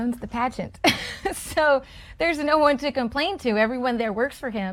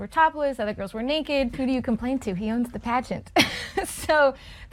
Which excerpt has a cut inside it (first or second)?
second